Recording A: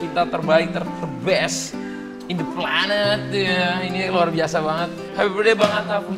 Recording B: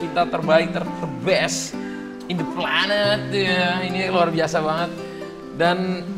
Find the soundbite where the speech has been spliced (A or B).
A